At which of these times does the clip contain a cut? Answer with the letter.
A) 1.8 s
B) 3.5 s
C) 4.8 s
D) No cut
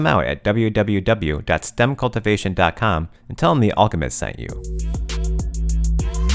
C